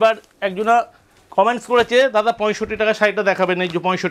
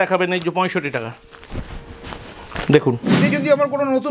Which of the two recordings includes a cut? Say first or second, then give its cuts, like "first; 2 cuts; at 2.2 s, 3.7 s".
second; 1 cut; at 3.1 s